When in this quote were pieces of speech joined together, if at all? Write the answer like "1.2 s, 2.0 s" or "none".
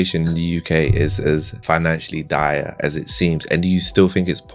1.5 s, 2.8 s